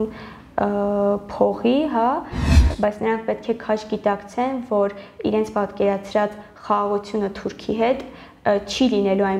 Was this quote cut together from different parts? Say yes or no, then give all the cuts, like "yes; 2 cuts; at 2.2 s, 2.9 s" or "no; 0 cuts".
yes; 1 cut; at 2.6 s